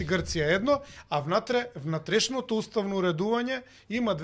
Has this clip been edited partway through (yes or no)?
no